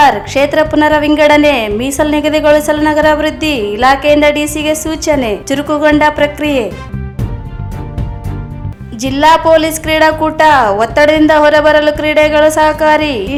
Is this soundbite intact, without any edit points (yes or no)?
yes